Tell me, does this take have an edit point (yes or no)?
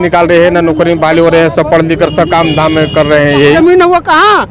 yes